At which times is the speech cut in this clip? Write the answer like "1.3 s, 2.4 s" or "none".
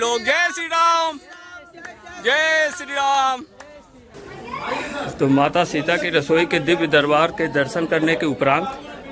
4.3 s